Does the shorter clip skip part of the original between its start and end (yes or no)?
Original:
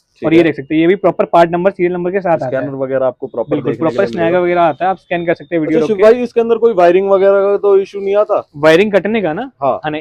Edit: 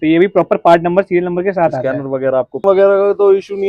yes